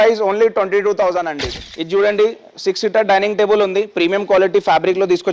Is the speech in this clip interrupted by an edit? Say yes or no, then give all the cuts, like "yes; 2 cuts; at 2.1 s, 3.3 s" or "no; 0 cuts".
yes; 1 cut; at 1.5 s